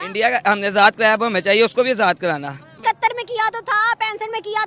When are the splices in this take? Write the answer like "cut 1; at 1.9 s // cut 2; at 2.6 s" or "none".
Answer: cut 1; at 2.6 s